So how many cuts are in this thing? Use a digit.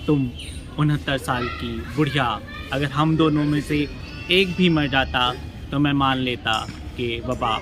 0